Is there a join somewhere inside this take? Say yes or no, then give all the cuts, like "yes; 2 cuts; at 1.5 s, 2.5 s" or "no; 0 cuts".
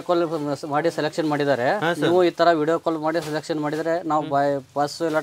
no; 0 cuts